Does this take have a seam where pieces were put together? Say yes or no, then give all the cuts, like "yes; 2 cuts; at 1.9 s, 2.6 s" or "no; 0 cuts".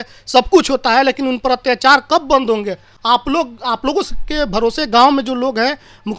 no; 0 cuts